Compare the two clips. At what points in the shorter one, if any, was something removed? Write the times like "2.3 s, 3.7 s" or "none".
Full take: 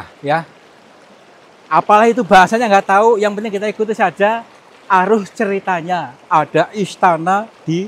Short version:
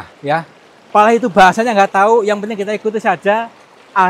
0.9 s